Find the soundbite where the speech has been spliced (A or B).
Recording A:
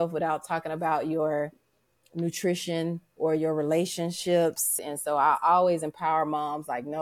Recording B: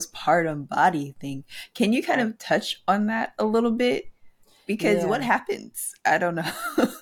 A